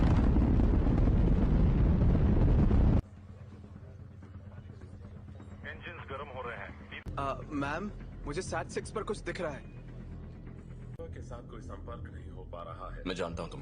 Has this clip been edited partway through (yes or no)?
yes